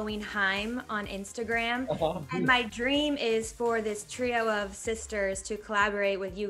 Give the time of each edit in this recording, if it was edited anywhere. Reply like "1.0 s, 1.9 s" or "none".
none